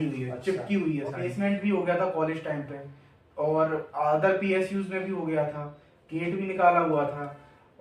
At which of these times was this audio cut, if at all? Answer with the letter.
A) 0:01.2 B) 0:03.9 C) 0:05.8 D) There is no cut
A